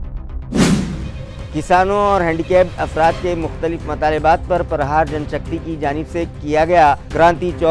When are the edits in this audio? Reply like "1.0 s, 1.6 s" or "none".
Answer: 1.0 s